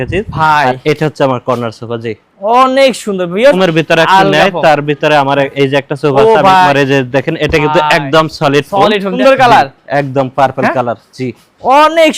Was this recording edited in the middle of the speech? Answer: yes; 3 cuts; at 3.6 s, 6.7 s, 9.1 s

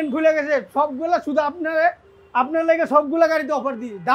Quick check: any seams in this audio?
no; 0 cuts

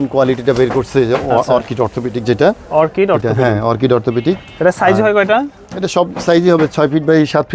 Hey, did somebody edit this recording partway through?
no; 0 cuts

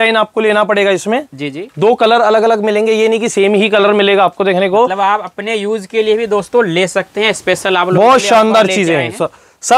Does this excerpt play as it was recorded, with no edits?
yes; 0 cuts

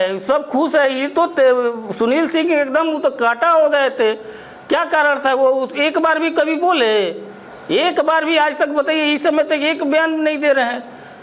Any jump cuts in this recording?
no; 0 cuts

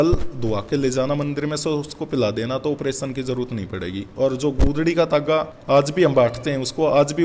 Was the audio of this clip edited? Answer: no; 0 cuts

